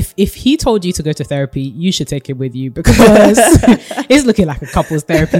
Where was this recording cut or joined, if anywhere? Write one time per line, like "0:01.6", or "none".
none

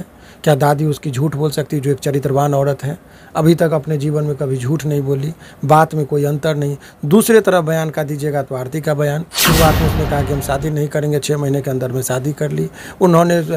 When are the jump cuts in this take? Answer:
0:09.3

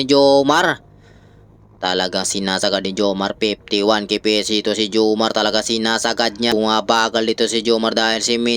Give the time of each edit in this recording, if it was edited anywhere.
0:06.5

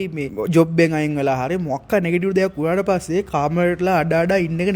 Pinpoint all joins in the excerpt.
none

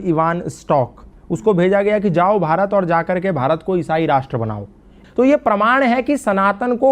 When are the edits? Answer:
0:05.0

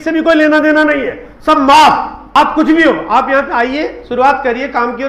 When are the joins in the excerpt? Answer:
0:02.4

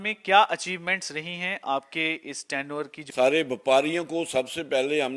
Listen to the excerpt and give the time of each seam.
0:03.0

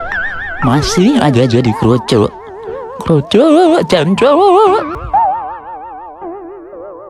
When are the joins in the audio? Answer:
0:04.9

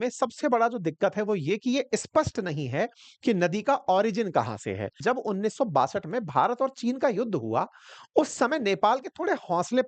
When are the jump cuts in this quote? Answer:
0:05.0

